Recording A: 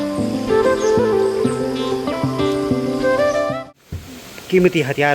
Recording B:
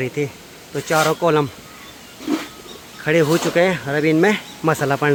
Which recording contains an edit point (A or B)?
A